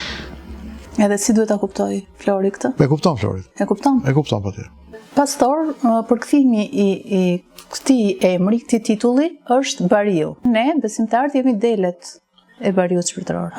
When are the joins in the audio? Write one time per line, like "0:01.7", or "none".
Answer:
0:05.0
0:10.4